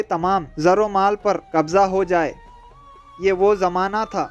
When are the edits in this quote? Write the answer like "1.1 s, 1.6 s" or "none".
none

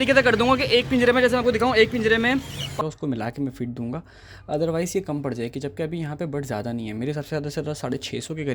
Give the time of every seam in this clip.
2.7 s

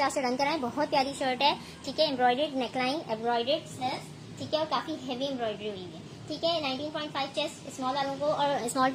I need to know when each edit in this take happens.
none

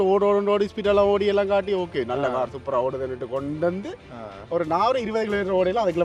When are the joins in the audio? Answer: none

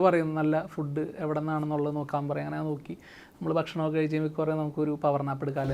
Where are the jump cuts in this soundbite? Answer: none

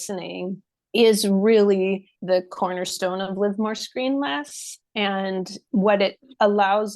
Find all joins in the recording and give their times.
2.1 s, 5.6 s

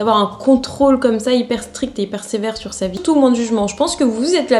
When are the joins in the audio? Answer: 3.0 s

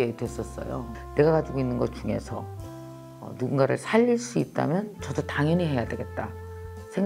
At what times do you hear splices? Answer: 0.9 s

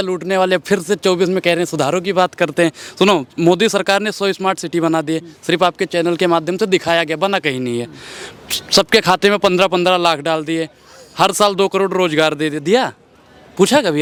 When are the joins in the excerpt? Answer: none

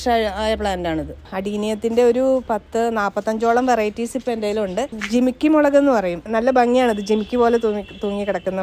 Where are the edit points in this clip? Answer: 1.2 s, 4.9 s, 6.2 s

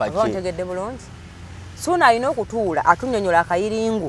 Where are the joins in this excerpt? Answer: none

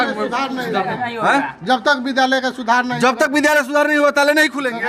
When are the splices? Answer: none

